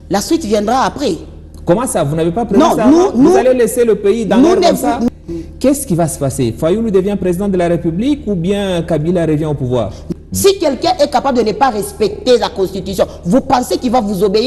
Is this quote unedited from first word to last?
no; 2 cuts; at 5.1 s, 10.0 s

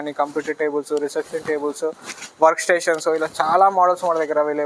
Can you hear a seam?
no; 0 cuts

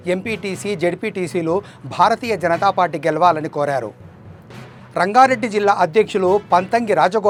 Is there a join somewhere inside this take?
no; 0 cuts

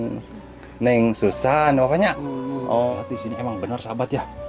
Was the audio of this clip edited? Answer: yes; 1 cut; at 2.9 s

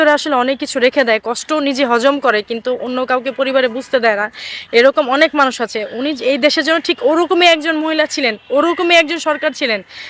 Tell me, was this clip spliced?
no; 0 cuts

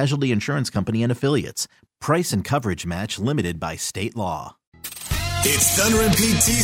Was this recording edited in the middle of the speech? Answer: yes; 1 cut; at 4.8 s

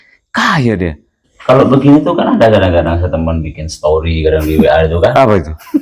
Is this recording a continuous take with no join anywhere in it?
no; 1 cut; at 1.2 s

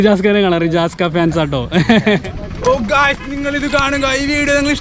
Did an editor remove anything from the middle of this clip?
yes; 1 cut; at 2.4 s

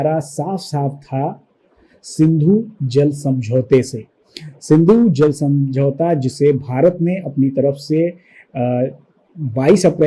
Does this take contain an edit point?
no; 0 cuts

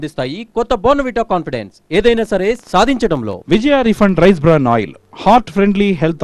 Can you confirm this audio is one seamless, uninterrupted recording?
no; 1 cut; at 3.3 s

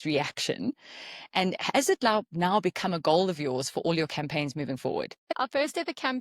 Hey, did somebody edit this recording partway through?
yes; 1 cut; at 5.3 s

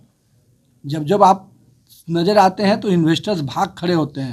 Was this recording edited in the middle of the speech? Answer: no; 0 cuts

